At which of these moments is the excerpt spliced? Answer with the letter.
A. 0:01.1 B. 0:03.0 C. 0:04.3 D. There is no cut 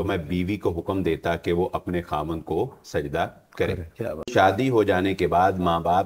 C